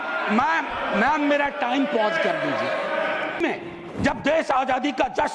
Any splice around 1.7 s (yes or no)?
no